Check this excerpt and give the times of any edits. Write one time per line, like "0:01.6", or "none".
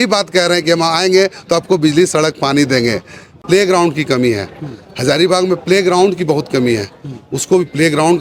0:03.4

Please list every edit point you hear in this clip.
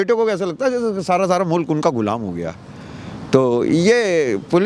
none

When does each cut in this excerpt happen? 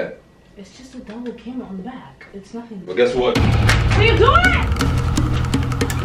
none

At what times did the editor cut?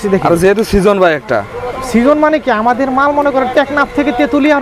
none

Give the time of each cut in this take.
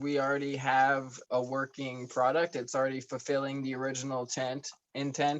0:01.1

